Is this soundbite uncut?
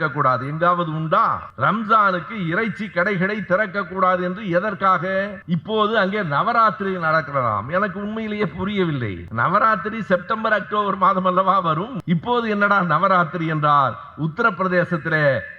no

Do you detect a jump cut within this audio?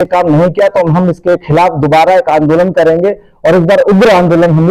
no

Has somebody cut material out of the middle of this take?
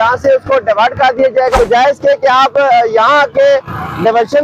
yes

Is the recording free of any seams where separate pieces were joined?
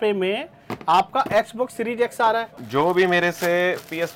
no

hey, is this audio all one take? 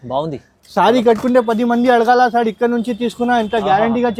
yes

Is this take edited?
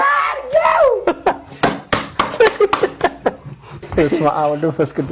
no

